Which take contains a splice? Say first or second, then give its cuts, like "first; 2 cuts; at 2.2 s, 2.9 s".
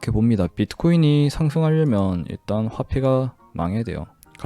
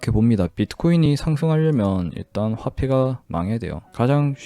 second; 2 cuts; at 1.1 s, 3.4 s